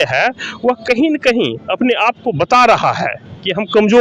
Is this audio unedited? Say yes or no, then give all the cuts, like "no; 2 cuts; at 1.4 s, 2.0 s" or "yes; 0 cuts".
yes; 0 cuts